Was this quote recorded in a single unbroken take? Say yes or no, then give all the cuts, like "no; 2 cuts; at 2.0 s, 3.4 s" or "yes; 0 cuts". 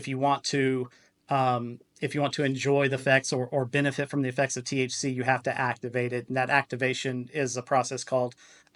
yes; 0 cuts